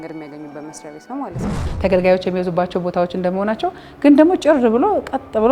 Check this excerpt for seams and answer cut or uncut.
cut